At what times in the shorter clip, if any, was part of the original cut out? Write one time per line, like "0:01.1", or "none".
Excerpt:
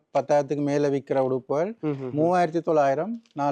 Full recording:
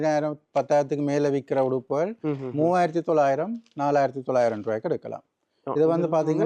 none